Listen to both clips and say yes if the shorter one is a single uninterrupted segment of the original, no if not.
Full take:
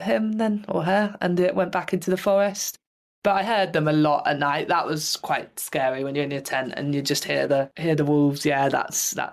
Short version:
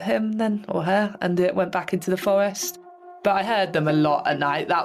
yes